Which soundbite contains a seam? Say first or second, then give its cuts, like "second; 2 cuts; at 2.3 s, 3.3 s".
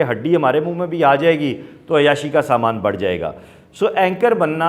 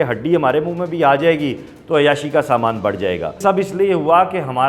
second; 1 cut; at 3.4 s